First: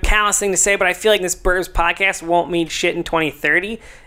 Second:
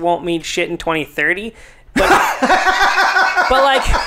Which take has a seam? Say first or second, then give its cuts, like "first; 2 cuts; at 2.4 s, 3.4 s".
first; 1 cut; at 1.2 s